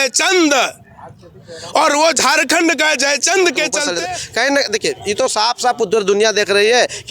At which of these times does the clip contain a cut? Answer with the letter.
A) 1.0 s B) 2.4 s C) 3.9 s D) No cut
C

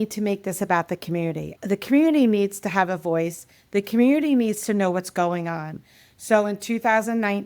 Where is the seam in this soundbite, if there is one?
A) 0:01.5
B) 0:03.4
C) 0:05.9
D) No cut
A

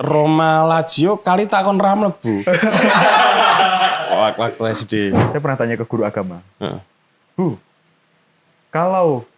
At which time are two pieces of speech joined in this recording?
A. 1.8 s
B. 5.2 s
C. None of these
B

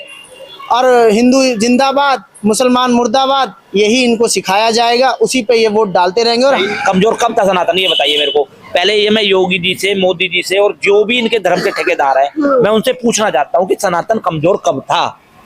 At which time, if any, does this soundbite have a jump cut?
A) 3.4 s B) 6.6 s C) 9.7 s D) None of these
B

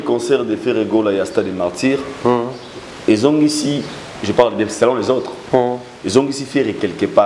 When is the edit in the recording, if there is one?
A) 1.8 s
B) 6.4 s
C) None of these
C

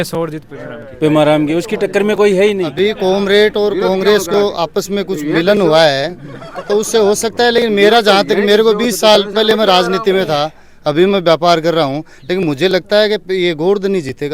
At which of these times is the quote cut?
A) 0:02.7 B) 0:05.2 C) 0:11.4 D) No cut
A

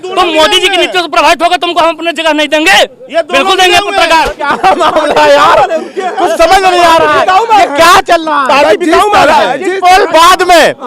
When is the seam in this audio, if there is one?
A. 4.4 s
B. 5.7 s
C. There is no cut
A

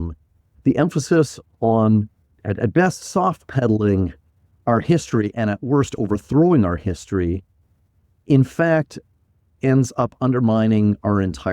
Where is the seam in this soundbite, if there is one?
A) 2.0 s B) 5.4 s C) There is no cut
B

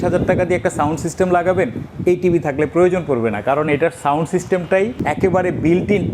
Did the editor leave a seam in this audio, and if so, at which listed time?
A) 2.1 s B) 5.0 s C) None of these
B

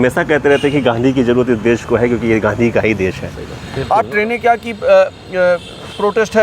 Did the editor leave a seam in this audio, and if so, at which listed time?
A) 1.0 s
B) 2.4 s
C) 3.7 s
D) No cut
C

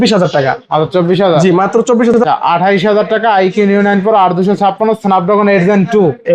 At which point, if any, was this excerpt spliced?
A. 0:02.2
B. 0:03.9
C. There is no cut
A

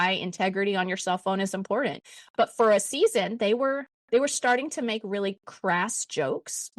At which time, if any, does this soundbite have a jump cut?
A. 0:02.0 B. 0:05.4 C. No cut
A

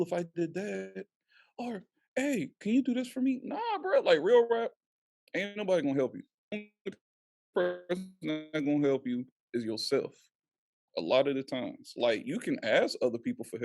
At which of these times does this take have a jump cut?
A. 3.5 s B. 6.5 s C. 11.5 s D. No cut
B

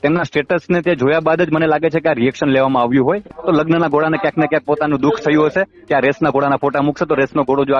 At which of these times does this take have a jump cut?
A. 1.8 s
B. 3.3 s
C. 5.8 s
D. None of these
B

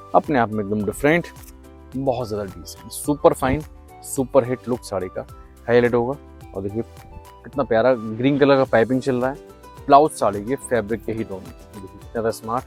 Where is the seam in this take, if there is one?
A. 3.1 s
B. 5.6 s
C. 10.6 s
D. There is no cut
D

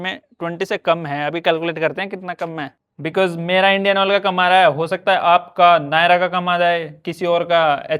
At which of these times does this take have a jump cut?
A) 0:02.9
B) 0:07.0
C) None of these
A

